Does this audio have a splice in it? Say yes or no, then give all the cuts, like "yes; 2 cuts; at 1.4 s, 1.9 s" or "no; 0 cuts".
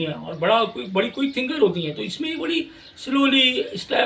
no; 0 cuts